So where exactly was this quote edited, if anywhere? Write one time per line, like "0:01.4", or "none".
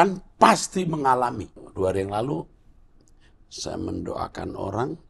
0:01.6